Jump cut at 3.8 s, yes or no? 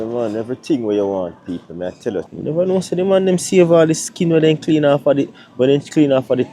no